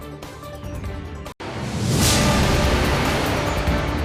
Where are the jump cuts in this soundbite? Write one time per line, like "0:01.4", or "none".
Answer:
0:01.3